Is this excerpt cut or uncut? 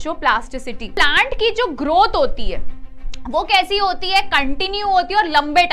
cut